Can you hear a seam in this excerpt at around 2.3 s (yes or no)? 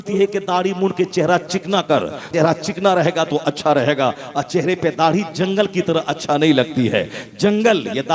yes